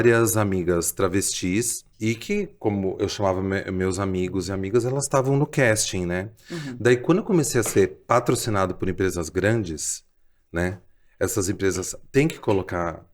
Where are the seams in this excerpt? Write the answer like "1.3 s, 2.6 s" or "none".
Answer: 1.8 s